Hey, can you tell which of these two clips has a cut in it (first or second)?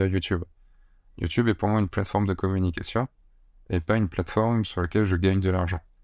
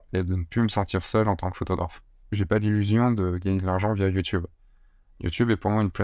second